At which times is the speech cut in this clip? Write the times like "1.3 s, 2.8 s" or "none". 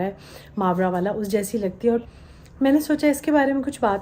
2.0 s